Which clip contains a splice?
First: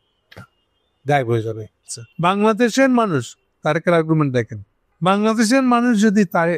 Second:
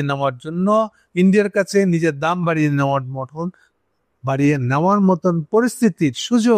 first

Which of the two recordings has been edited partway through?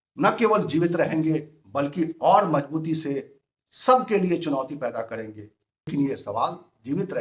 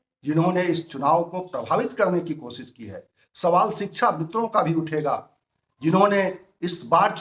first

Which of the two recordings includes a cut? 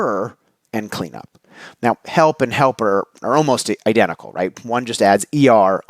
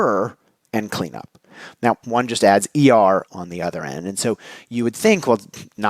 second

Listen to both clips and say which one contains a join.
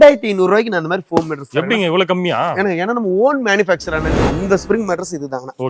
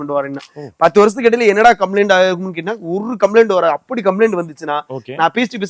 first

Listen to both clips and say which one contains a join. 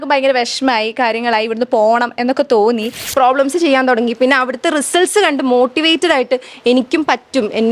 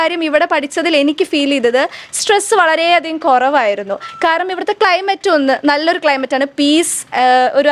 first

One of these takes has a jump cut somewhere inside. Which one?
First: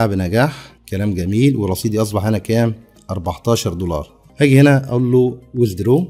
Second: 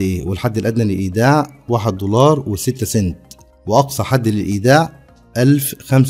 first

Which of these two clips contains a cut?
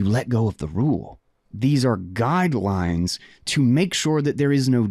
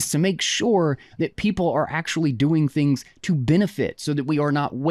first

